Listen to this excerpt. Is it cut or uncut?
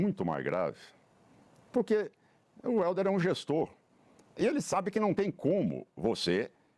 uncut